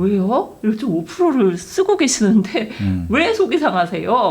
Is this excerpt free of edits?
yes; 0 cuts

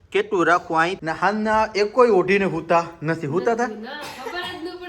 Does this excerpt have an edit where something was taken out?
yes; 1 cut; at 1.0 s

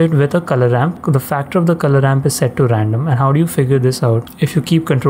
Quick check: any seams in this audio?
no; 0 cuts

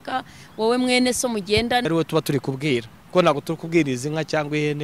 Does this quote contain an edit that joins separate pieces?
yes; 1 cut; at 1.8 s

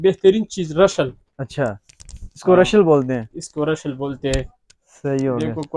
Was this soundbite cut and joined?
no; 0 cuts

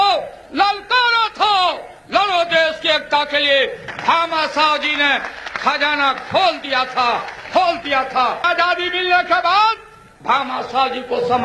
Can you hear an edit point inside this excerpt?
yes; 2 cuts; at 3.8 s, 8.5 s

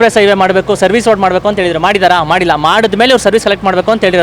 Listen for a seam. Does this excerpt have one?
no; 0 cuts

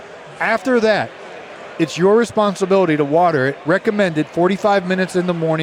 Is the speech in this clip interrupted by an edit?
no; 0 cuts

